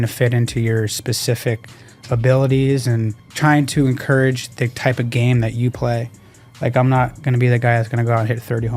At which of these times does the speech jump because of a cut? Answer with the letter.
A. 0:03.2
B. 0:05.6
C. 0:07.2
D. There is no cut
A